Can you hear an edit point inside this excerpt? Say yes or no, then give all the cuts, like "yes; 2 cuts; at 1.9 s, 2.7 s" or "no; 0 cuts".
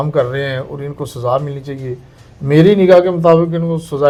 no; 0 cuts